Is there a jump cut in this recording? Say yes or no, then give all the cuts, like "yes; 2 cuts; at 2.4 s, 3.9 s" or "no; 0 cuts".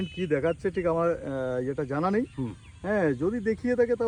no; 0 cuts